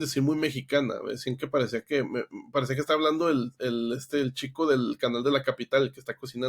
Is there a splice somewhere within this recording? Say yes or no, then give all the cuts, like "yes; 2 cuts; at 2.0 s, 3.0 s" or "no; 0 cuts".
no; 0 cuts